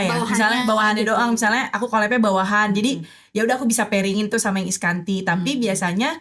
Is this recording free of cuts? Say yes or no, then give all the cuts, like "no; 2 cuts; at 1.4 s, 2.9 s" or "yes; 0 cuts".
yes; 0 cuts